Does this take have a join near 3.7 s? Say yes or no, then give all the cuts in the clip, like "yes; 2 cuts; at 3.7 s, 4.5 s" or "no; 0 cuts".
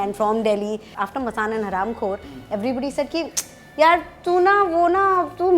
no; 1 cut; at 1.0 s